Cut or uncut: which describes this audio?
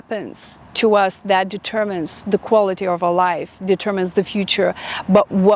uncut